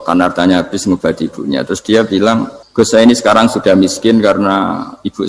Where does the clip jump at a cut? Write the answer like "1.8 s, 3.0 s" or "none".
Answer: 2.6 s